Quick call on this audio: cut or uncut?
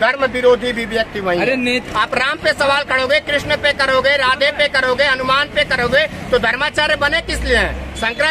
cut